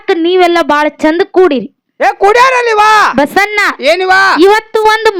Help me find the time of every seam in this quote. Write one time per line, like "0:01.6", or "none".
none